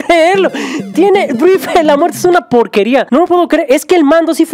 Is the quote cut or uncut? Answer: cut